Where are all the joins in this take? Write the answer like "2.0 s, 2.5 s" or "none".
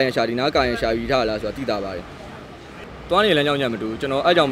none